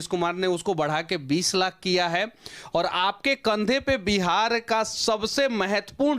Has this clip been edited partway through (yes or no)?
no